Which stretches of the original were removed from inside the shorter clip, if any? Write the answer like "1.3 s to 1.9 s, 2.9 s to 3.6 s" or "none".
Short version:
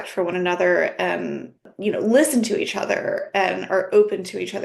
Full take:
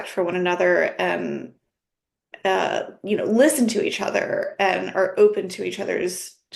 1.7 s to 2.9 s